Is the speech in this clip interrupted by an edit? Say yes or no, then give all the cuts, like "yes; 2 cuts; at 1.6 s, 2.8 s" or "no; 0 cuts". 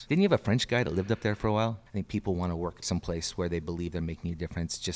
yes; 2 cuts; at 1.8 s, 2.8 s